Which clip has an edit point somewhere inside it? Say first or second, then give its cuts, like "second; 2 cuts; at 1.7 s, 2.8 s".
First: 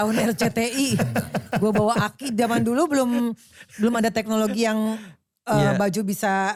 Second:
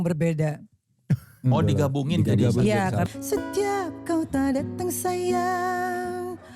second; 1 cut; at 3.1 s